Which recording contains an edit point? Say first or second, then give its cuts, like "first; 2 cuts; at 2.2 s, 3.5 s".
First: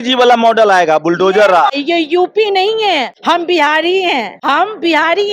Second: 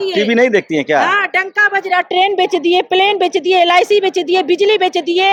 first; 3 cuts; at 1.7 s, 3.1 s, 4.3 s